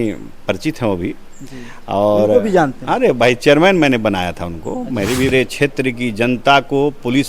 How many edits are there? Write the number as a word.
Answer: one